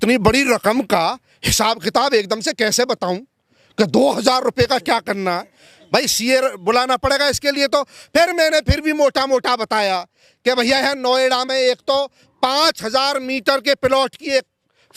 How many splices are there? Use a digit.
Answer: 0